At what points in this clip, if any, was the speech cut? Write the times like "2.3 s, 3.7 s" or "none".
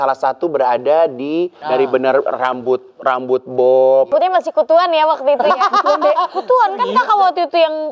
1.6 s, 4.1 s